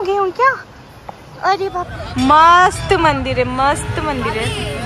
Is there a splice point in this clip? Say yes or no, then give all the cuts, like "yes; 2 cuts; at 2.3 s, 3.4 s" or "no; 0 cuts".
yes; 1 cut; at 2.0 s